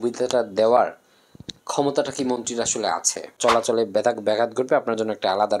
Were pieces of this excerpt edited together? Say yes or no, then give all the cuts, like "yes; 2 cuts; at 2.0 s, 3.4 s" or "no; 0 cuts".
yes; 1 cut; at 3.3 s